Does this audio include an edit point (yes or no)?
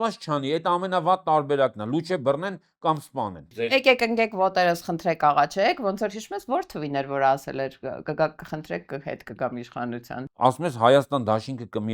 yes